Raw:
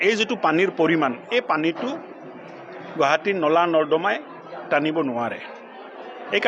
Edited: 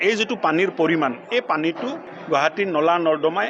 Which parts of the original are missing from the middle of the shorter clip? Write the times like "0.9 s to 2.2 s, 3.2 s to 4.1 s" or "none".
2.1 s to 2.8 s

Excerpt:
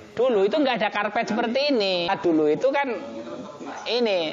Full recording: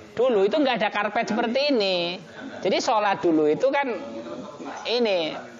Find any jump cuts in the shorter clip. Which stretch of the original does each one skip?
2.1 s to 3.1 s

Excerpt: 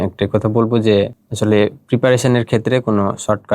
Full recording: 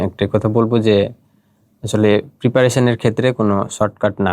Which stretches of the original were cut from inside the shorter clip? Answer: 1.2 s to 1.8 s

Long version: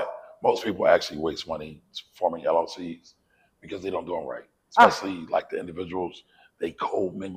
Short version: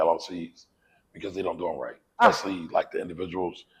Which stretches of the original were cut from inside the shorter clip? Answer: 4.7 s to 4.8 s

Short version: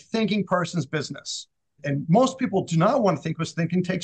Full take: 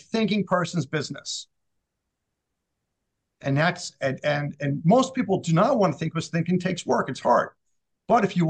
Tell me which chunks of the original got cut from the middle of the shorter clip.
1.8 s to 4.5 s

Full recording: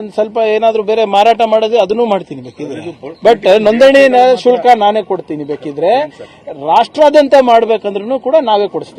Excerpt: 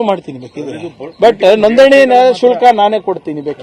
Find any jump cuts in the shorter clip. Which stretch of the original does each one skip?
none

